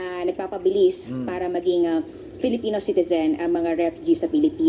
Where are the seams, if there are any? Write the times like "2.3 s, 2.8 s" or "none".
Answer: 3.7 s